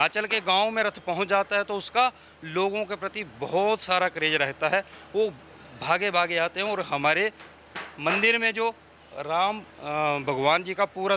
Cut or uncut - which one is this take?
uncut